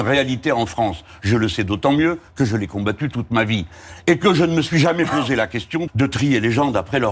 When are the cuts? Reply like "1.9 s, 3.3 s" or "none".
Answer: 5.9 s